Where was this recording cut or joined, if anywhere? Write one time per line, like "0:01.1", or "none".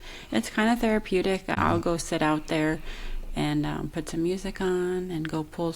0:01.5